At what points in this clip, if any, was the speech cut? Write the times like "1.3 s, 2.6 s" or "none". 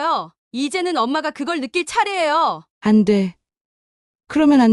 2.7 s